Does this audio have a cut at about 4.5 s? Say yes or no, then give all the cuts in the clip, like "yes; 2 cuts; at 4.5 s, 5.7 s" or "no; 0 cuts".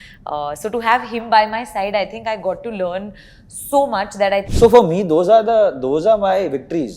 yes; 1 cut; at 4.5 s